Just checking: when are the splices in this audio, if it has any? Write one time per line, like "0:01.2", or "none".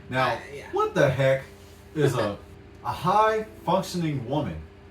0:02.5

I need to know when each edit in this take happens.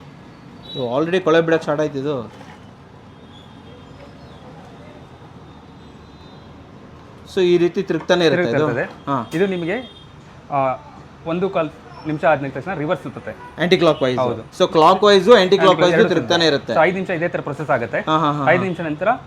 none

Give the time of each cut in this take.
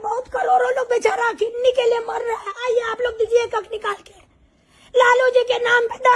none

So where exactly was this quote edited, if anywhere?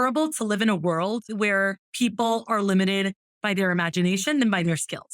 0:01.3

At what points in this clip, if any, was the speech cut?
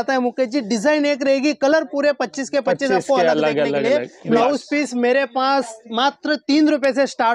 0:04.4

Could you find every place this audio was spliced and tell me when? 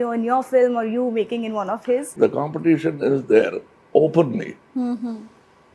0:02.1

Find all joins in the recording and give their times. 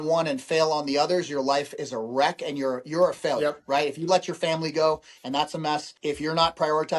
0:05.9

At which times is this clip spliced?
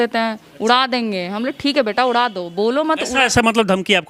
none

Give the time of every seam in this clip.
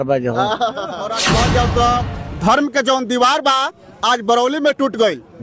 0:01.4

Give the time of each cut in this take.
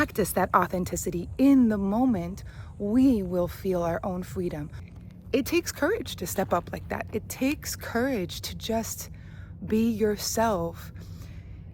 0:04.9

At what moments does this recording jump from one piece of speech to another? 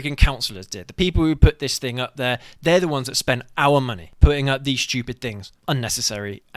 0:04.0
0:05.5

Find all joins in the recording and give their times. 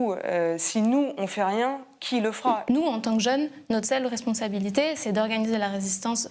0:02.6

